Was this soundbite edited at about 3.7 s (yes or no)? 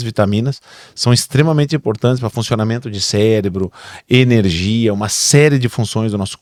no